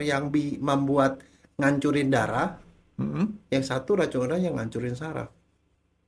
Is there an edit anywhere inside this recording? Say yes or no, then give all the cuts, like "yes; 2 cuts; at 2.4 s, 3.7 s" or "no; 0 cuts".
no; 0 cuts